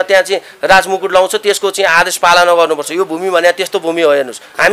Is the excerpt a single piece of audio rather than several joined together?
yes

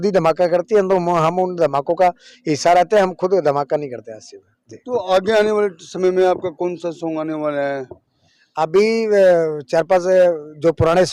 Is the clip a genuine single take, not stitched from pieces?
yes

